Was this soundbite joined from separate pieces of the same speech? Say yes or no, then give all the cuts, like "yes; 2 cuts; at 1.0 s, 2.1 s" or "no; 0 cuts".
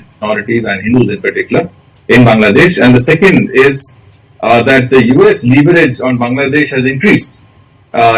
no; 0 cuts